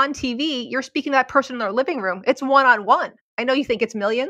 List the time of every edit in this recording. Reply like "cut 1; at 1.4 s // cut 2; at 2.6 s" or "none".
none